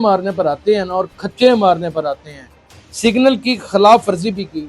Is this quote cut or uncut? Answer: cut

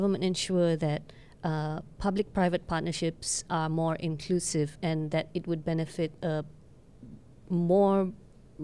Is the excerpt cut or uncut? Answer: uncut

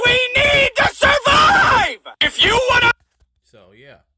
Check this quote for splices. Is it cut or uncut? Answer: uncut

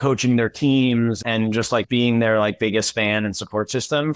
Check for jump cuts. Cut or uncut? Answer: cut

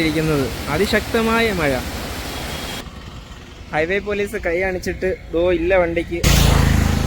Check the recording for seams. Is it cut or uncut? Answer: cut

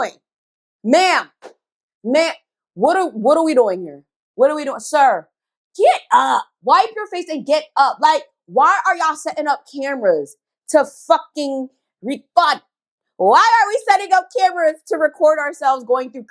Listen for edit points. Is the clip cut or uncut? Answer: uncut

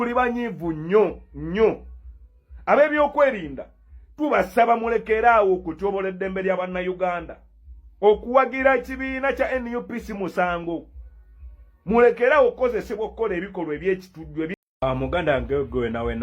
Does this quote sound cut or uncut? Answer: cut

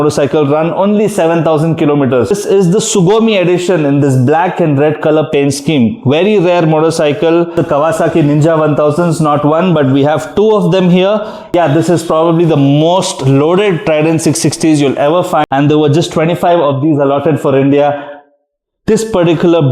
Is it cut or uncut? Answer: cut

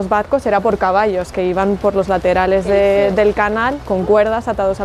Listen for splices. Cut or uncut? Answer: uncut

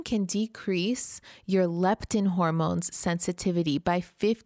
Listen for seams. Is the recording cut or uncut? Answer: uncut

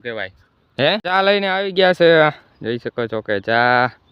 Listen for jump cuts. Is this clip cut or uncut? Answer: cut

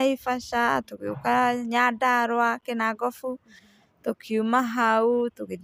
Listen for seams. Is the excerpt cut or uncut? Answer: uncut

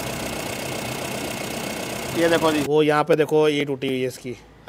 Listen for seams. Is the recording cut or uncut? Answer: cut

